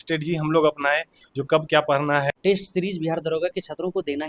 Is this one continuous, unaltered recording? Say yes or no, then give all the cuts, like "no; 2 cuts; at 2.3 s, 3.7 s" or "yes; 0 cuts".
no; 1 cut; at 2.4 s